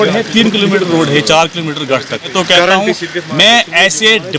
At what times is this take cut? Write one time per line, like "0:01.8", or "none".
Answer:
0:02.3